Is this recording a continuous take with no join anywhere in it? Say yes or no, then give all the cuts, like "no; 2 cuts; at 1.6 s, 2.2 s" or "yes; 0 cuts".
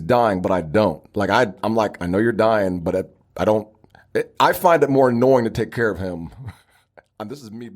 yes; 0 cuts